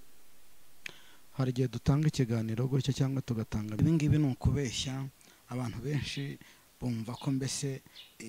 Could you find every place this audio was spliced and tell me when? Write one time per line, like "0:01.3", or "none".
0:03.8